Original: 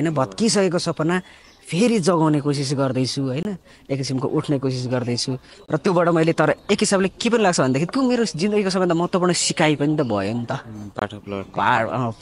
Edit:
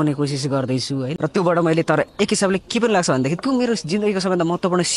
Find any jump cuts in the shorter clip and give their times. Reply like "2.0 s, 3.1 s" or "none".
1.1 s